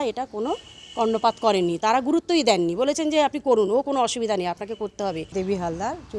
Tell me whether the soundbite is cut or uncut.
cut